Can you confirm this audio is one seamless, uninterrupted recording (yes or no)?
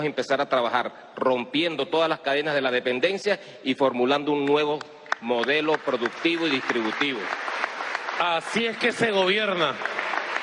no